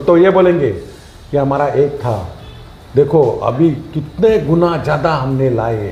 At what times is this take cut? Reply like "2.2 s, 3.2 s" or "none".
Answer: none